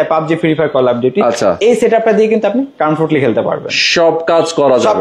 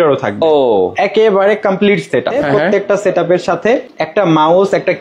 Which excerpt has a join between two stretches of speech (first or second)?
second